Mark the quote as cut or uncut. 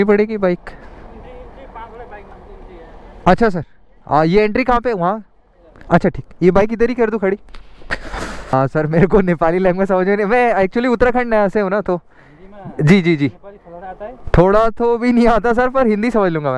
cut